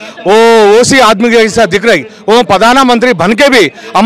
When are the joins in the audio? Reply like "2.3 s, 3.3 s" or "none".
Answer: none